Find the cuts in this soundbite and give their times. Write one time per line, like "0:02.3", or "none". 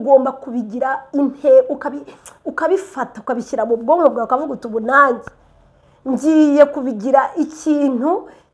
none